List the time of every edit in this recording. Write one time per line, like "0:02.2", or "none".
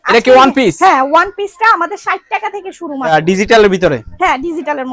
0:03.1